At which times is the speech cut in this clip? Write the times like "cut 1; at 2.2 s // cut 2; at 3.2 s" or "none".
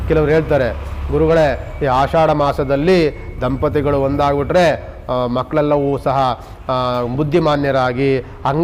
none